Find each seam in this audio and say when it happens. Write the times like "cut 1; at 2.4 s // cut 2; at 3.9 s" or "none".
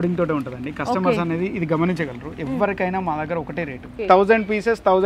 cut 1; at 3.9 s

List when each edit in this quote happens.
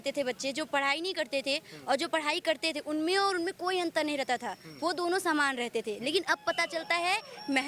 none

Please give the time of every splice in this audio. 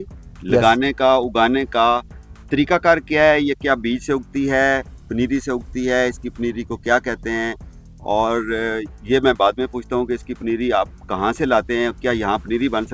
none

